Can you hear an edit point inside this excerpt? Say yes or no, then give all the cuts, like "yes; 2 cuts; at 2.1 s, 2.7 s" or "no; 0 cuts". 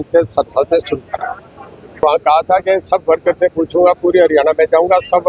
yes; 1 cut; at 2.0 s